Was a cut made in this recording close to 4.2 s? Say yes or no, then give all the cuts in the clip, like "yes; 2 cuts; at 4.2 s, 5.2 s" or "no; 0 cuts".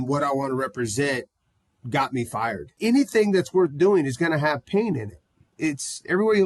no; 2 cuts; at 2.8 s, 5.4 s